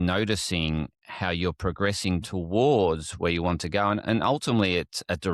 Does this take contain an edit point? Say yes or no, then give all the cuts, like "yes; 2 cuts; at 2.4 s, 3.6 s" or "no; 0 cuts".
no; 0 cuts